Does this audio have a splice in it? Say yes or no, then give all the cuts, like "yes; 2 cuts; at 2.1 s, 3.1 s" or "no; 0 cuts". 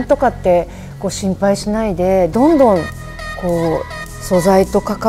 no; 0 cuts